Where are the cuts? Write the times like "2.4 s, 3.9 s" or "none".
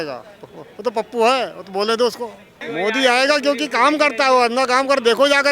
2.5 s